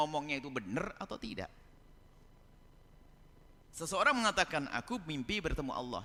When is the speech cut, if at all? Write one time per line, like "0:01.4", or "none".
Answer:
none

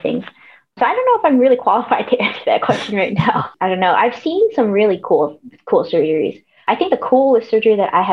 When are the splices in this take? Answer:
0:03.5

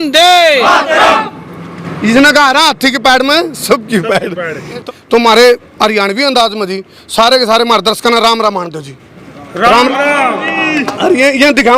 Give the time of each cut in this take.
0:04.8

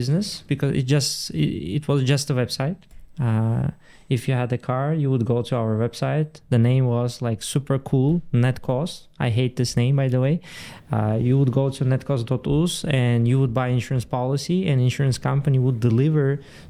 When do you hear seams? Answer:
none

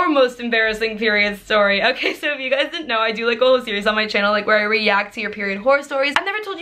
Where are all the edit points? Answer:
none

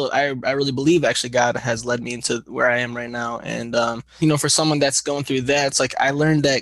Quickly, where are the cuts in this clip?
0:04.1

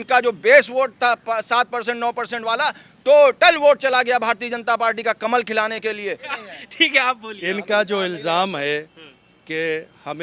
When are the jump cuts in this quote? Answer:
0:06.2

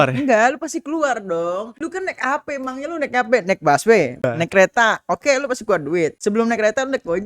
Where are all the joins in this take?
0:01.7
0:04.2
0:06.2

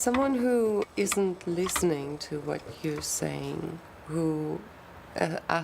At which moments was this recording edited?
0:00.9

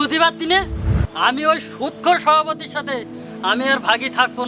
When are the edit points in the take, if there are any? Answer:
none

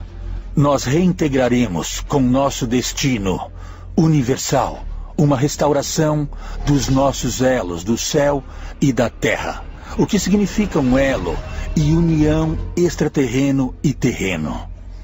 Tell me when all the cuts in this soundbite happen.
0:02.2

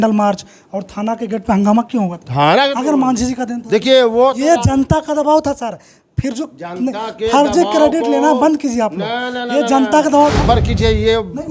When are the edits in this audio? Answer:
0:10.4

